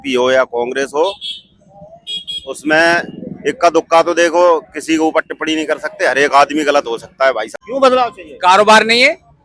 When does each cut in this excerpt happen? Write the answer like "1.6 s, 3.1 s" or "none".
7.4 s

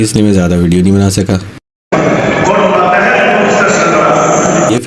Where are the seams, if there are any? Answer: none

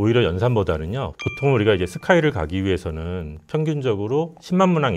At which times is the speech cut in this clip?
1.1 s

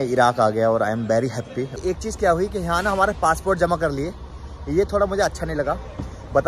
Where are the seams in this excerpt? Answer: 1.8 s

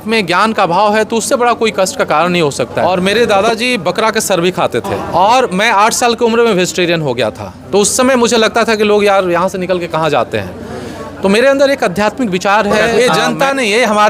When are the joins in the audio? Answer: 3.1 s, 5.0 s, 12.8 s

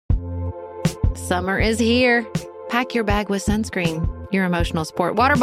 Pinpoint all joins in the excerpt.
0.9 s

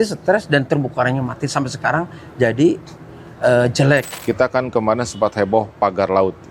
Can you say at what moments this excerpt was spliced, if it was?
4.1 s

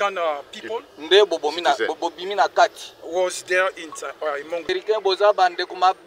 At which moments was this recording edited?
4.7 s

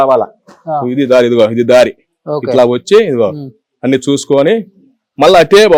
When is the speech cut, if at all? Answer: none

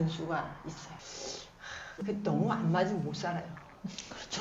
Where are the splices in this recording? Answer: 1.0 s

